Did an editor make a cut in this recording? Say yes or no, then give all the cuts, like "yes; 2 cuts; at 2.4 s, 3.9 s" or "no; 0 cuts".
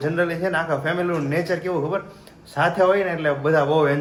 no; 0 cuts